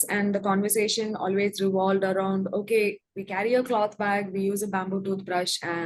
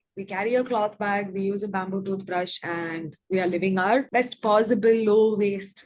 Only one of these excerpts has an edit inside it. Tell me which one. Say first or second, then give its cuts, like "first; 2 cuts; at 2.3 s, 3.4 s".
second; 1 cut; at 4.1 s